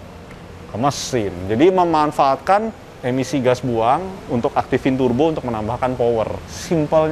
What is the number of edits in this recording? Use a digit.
0